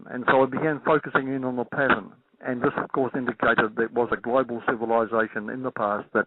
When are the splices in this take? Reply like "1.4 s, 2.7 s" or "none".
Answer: 2.3 s